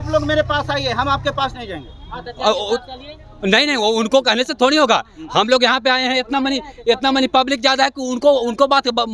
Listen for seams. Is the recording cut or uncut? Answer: uncut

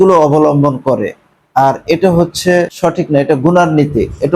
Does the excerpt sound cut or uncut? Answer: cut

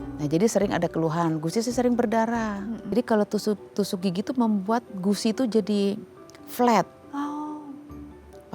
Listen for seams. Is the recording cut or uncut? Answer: cut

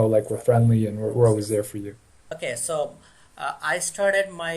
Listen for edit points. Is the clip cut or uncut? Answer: cut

